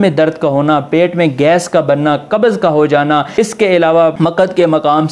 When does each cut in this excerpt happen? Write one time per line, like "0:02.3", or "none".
0:03.3
0:04.1